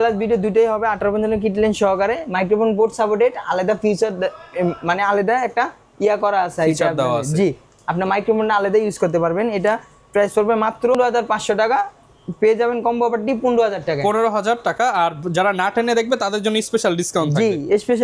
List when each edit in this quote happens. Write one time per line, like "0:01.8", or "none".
none